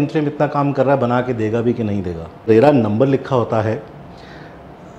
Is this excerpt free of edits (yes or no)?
no